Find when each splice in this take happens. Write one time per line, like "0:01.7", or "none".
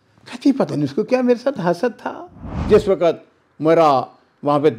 0:02.7